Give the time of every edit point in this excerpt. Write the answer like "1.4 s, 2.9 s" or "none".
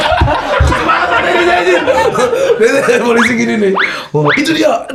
none